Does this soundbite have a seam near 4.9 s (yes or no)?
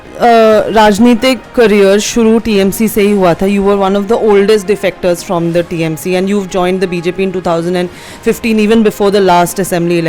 no